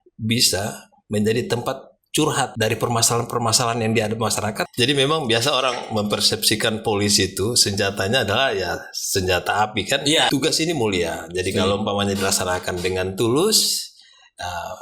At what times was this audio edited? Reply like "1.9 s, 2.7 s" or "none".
2.5 s, 4.6 s, 10.3 s